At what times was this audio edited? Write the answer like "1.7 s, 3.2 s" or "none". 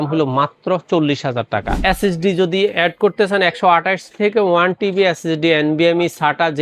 1.7 s